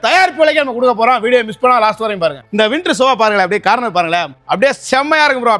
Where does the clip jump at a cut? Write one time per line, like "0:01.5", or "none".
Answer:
0:02.4
0:04.3